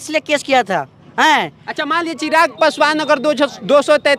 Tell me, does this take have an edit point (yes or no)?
no